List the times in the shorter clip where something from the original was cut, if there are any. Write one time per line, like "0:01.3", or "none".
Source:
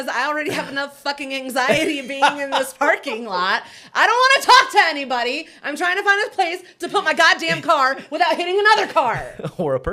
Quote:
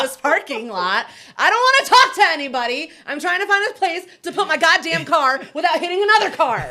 none